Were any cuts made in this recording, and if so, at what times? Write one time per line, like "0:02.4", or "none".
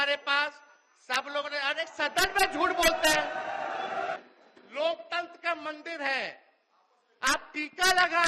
0:04.2